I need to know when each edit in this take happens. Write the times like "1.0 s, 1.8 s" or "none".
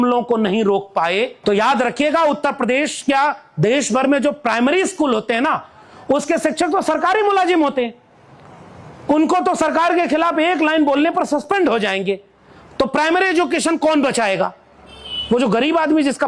1.3 s